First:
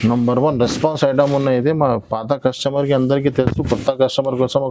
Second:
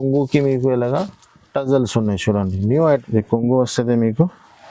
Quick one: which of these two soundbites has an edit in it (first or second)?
second